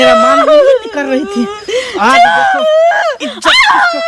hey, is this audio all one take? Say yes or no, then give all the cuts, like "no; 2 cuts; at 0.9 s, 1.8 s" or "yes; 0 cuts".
yes; 0 cuts